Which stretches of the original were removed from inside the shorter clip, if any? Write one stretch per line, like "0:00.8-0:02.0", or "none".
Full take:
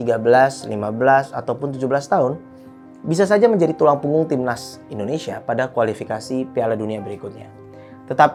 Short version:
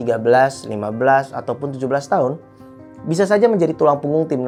none

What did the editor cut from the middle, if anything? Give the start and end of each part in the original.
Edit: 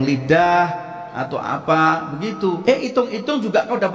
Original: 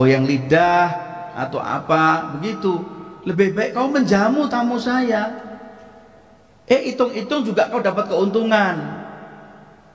0:02.8-0:06.6

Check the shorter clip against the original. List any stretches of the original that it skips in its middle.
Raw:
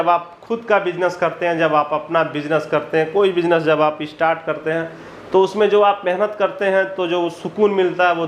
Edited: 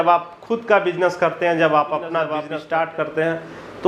0:02.4-0:03.9

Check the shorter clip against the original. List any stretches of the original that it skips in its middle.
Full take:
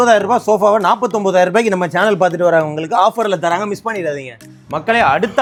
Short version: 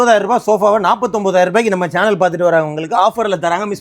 none

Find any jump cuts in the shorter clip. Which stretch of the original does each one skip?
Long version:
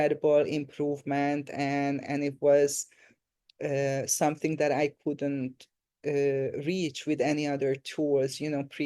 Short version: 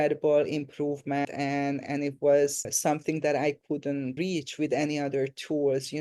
0:01.3-0:01.5
0:02.9-0:04.1
0:05.5-0:06.6

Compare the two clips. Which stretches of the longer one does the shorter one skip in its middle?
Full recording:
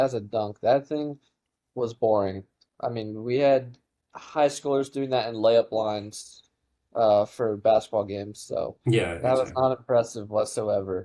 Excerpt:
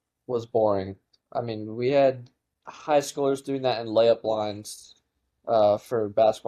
none

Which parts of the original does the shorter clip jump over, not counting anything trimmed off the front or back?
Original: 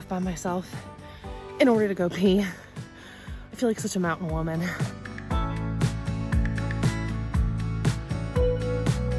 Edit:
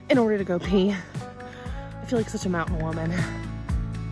0:04.7-0:06.8

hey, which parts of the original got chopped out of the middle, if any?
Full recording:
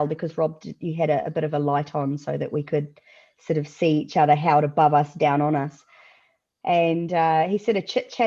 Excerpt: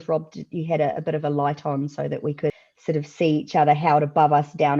0:03.0-0:03.3

